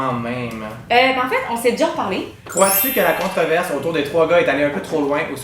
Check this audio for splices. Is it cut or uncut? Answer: cut